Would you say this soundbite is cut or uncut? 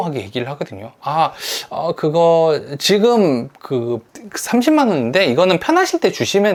uncut